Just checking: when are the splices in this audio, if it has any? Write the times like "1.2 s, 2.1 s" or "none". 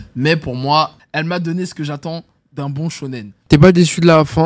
1.0 s, 3.3 s